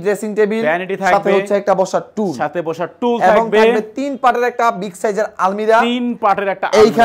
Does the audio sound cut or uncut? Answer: uncut